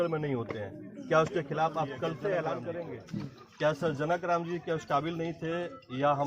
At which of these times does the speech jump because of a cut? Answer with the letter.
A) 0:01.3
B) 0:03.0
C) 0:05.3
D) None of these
B